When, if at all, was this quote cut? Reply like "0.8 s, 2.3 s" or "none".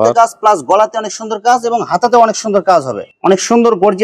3.0 s